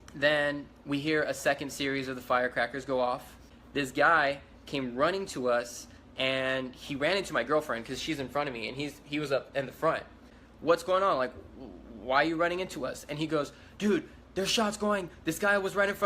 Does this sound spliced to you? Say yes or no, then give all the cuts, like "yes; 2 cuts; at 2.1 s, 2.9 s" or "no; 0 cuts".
yes; 1 cut; at 8.7 s